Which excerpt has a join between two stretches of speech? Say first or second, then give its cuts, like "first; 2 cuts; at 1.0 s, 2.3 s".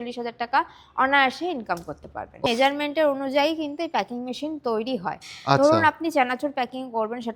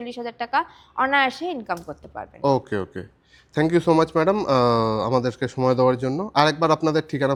first; 1 cut; at 2.5 s